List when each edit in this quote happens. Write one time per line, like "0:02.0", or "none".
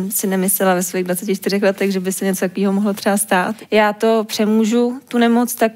0:03.6